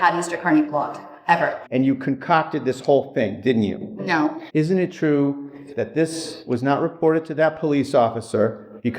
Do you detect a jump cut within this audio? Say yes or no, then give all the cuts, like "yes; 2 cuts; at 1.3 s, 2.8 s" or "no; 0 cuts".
yes; 2 cuts; at 1.6 s, 4.4 s